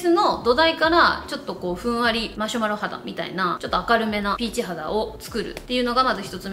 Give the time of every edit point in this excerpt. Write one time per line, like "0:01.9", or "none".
none